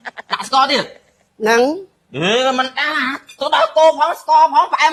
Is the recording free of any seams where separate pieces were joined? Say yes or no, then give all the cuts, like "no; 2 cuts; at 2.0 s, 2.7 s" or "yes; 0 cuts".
yes; 0 cuts